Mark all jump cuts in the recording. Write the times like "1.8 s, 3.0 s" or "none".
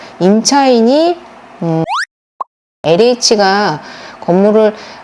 2.2 s

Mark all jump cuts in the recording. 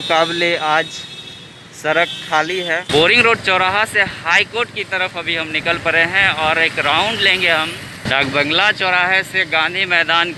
2.9 s, 8.0 s

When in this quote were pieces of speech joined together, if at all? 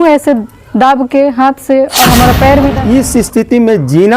2.7 s

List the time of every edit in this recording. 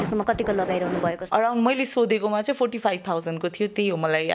1.2 s

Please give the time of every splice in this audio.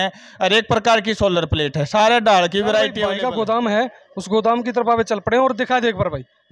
3.0 s

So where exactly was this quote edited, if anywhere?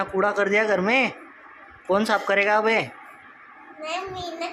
none

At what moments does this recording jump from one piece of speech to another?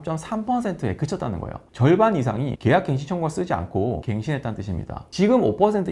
2.5 s, 4.0 s, 5.0 s

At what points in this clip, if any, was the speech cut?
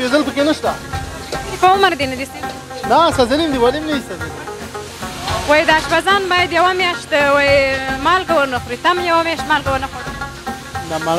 none

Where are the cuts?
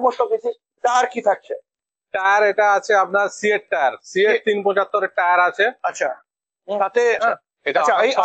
7.2 s

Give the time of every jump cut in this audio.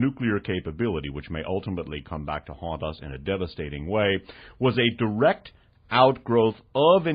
1.3 s

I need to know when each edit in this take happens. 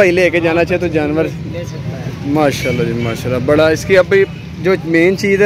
none

